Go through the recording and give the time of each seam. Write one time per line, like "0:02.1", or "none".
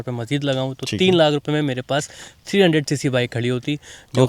none